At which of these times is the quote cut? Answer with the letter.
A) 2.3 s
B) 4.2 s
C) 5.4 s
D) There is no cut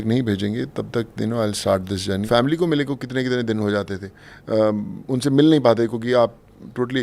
A